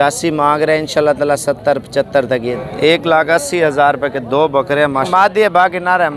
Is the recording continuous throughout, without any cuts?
no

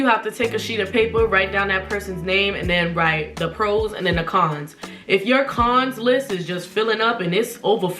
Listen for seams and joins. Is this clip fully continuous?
yes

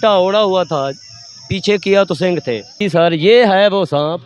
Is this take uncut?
no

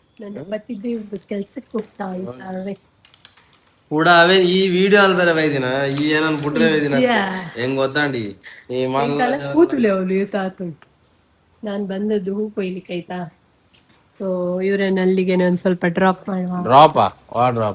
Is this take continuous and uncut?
yes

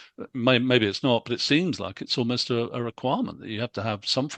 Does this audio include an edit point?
no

